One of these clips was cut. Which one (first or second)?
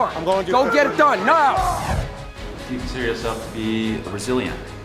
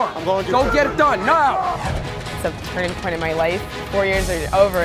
second